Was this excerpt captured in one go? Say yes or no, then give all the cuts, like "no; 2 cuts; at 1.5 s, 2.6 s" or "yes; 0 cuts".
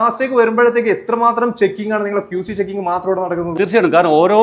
yes; 0 cuts